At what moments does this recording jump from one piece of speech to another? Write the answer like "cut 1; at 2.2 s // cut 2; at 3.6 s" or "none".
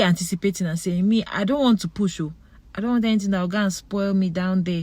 none